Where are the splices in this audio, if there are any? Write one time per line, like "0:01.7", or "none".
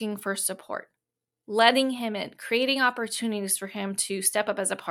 none

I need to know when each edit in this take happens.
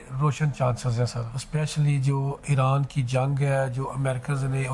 0:01.3

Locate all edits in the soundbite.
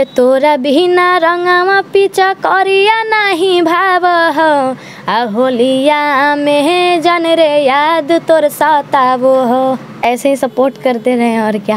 none

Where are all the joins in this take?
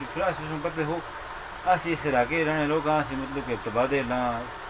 none

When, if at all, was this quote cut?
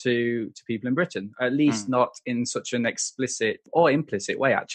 0:03.6

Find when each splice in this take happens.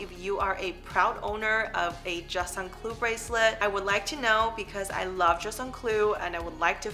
none

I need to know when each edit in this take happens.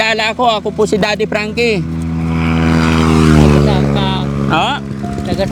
none

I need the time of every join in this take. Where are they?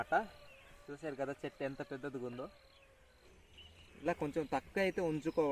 none

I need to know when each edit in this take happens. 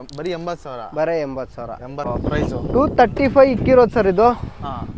0:02.1

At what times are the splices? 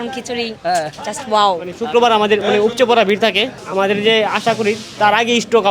0:01.8
0:03.5

